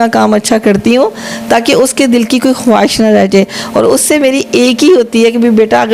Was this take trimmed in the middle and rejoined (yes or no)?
no